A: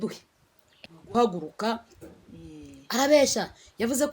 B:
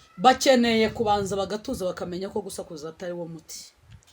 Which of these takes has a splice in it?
A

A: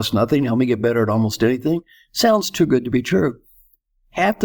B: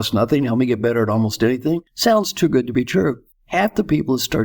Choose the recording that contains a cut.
B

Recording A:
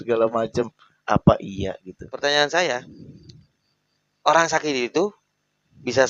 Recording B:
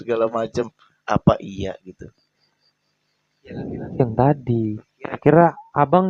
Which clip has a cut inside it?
A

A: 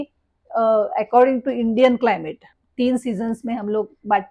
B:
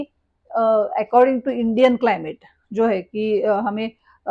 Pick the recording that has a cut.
A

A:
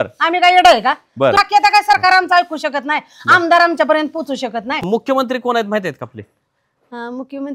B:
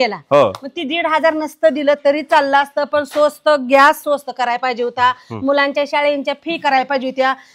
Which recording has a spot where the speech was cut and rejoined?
A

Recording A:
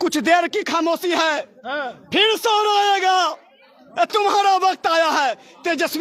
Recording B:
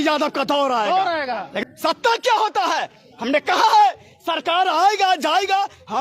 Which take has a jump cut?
B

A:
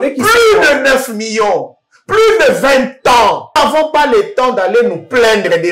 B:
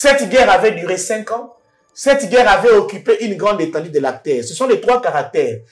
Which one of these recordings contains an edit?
A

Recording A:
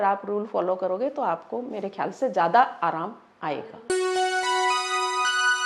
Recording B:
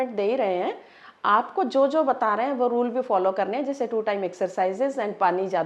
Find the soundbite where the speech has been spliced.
A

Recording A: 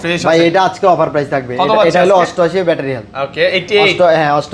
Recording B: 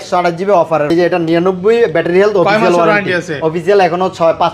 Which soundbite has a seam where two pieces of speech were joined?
B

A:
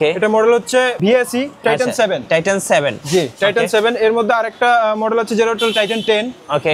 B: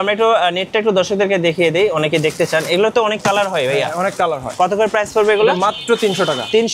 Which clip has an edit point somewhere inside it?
A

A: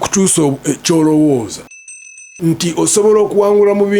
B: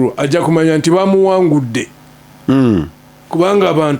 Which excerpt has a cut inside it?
A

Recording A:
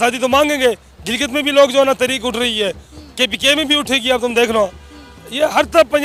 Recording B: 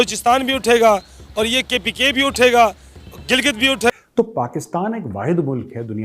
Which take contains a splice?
B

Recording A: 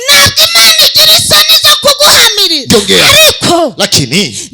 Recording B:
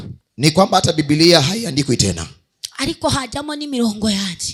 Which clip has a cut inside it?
A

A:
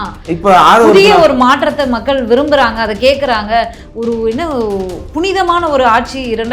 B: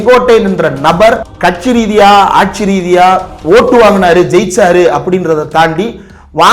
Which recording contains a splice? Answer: B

